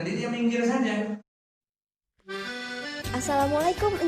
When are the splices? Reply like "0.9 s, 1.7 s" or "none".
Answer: 1.3 s